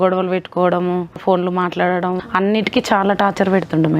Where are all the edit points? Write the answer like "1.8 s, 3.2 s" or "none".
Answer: 1.2 s, 2.2 s